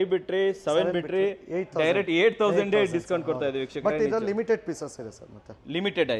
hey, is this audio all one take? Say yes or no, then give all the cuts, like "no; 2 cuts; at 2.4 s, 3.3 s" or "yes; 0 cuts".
yes; 0 cuts